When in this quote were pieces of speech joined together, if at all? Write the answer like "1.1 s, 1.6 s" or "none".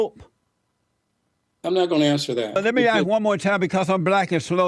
2.6 s